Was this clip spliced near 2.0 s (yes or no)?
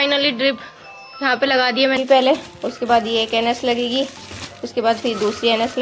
yes